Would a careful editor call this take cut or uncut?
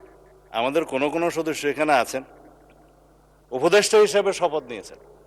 uncut